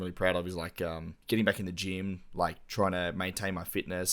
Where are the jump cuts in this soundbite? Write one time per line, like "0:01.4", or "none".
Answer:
0:01.1